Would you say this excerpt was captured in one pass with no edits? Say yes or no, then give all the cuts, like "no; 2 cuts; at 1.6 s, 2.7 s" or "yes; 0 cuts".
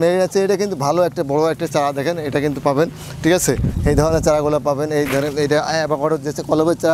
yes; 0 cuts